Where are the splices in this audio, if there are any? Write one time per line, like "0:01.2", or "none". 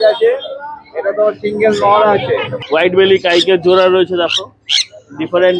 0:02.5